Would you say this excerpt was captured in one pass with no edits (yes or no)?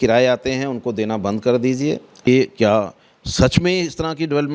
no